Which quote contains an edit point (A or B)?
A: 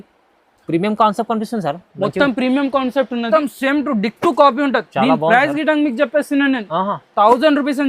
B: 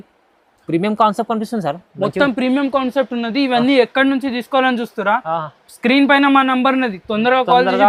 A